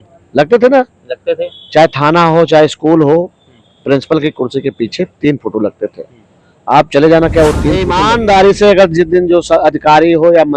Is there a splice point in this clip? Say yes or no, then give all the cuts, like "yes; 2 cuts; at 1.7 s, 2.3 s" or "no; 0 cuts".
yes; 1 cut; at 7.9 s